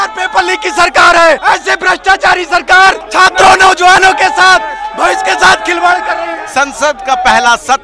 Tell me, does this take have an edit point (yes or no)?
yes